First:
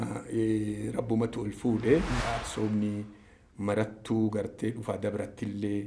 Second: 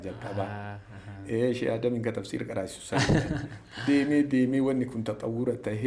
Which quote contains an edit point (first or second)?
first